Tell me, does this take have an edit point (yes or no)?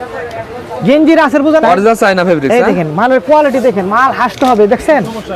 yes